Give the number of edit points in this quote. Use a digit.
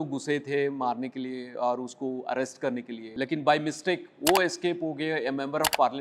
1